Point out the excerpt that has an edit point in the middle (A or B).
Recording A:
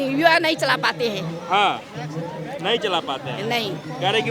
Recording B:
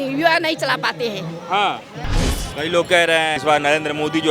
B